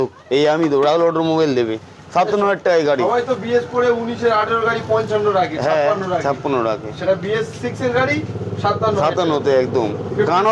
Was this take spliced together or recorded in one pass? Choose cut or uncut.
uncut